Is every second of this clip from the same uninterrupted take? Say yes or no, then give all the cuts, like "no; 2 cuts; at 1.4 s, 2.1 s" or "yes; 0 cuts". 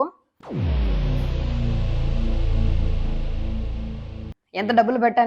no; 1 cut; at 4.4 s